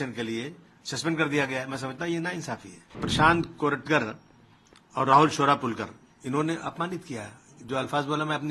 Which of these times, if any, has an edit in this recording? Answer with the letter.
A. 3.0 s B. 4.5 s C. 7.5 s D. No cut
A